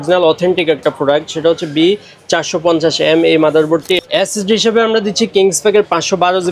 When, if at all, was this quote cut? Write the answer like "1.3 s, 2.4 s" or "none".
4.0 s